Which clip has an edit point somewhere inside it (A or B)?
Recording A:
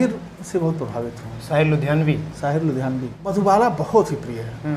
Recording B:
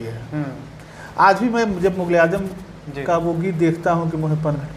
A